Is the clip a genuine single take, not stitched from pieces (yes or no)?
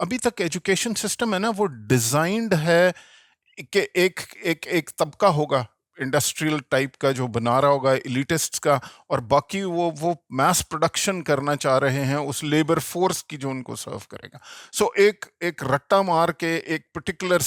yes